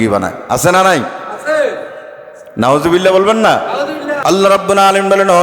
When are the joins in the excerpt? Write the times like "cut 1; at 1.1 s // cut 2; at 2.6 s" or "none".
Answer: cut 1; at 4.2 s